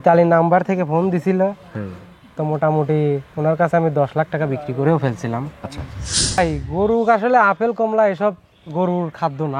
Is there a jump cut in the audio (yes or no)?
yes